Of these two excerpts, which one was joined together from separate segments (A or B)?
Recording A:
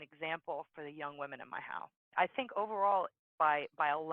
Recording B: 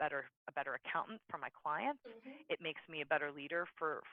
A